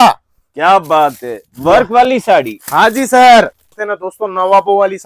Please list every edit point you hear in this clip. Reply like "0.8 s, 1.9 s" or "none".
3.7 s